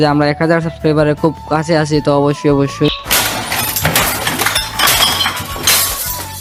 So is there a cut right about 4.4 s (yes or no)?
no